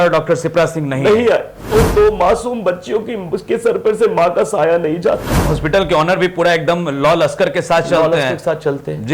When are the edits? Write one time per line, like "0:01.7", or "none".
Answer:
0:01.7
0:05.5